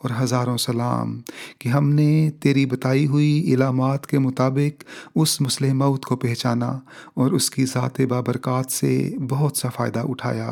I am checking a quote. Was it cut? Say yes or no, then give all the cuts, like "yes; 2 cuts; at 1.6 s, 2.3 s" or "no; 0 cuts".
no; 0 cuts